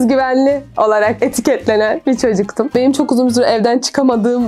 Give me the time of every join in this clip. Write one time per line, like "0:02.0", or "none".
0:02.7